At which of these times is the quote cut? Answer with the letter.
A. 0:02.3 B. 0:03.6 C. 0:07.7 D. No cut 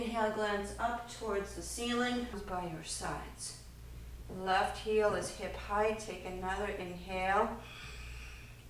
A